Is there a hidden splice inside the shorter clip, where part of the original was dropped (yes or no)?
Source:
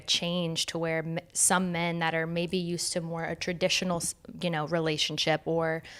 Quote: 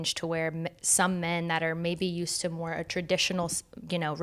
no